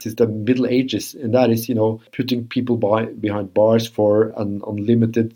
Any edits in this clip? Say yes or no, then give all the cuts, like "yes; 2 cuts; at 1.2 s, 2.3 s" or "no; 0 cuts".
yes; 1 cut; at 2.1 s